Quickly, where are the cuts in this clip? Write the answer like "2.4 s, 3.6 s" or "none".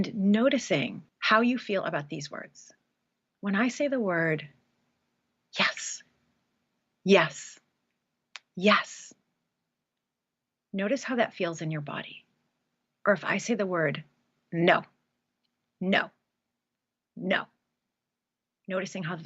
1.1 s